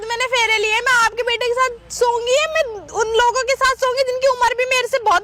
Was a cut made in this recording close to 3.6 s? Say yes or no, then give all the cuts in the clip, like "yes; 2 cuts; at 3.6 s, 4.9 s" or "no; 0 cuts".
no; 0 cuts